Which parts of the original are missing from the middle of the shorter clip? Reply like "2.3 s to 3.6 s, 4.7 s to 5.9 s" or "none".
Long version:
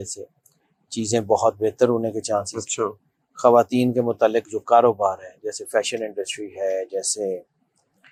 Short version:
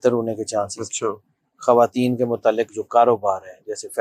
none